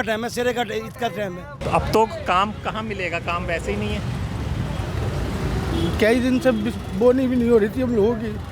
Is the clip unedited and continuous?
no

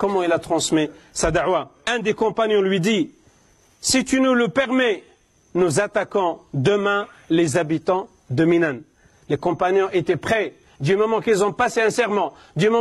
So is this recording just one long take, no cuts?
no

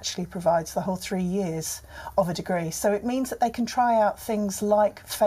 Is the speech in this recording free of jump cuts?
yes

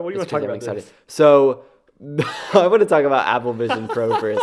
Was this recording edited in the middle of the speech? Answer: no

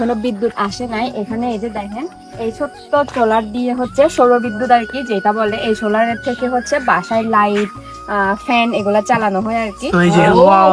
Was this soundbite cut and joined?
yes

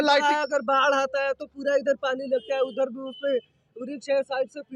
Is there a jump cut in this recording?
no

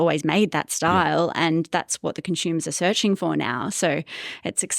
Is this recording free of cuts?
yes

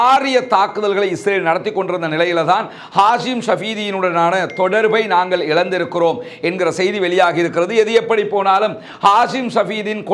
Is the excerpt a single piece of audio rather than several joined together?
yes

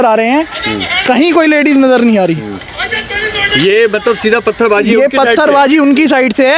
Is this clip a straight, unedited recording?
yes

